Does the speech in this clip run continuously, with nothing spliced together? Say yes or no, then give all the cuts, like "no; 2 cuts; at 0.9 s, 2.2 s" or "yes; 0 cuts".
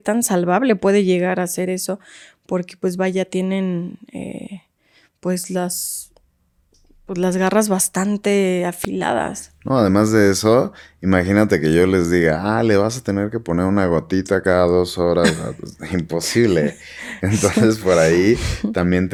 yes; 0 cuts